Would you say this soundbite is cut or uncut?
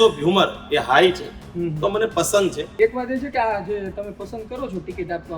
cut